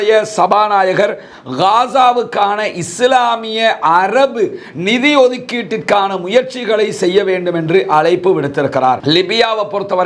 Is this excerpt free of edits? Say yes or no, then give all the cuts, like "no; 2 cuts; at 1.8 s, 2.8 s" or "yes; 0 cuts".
yes; 0 cuts